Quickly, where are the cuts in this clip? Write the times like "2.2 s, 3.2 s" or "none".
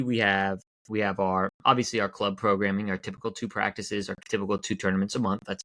1.6 s